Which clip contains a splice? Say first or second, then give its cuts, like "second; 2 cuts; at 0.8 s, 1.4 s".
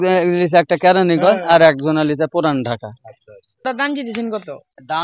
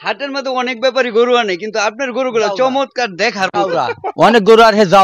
first; 1 cut; at 3.6 s